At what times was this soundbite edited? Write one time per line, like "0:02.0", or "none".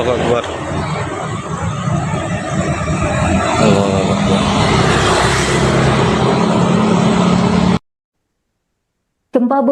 0:07.7